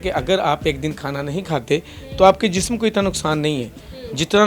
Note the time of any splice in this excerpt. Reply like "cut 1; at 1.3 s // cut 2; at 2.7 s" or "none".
none